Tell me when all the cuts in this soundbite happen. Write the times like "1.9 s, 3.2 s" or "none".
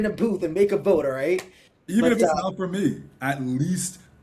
none